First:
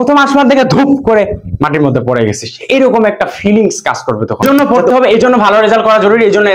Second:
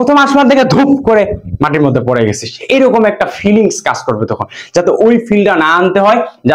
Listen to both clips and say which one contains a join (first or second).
first